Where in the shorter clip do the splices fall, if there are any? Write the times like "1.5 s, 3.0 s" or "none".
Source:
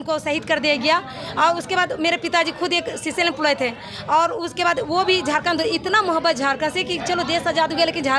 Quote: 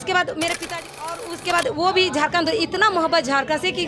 1.2 s